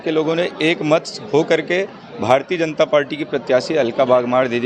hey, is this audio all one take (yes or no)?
yes